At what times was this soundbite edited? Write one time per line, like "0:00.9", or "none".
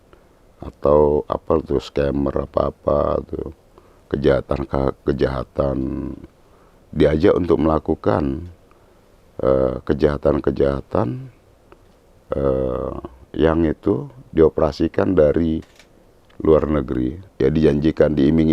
0:17.2